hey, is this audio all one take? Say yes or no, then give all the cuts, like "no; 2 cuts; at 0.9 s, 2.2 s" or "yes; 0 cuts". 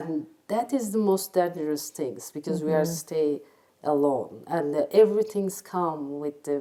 yes; 0 cuts